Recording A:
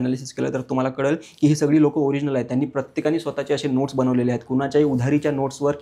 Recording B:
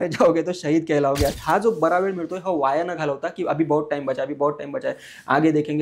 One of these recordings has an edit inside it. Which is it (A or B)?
B